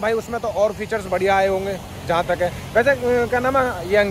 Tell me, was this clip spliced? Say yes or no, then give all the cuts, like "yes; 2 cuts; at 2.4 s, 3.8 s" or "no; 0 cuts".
no; 0 cuts